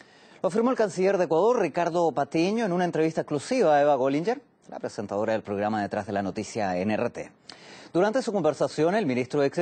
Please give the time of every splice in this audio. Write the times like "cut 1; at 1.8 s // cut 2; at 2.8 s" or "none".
cut 1; at 7.9 s